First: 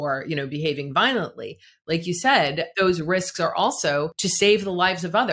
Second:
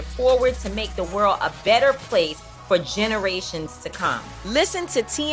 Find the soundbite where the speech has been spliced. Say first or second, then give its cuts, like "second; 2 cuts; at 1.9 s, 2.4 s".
first; 2 cuts; at 2.7 s, 4.2 s